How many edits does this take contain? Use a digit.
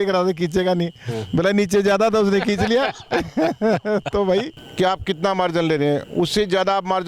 1